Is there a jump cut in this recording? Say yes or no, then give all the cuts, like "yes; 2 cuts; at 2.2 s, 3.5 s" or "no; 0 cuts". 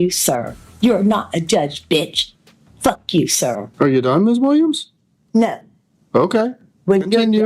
yes; 1 cut; at 3.7 s